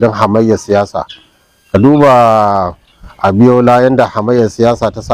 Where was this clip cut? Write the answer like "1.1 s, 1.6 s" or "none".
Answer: none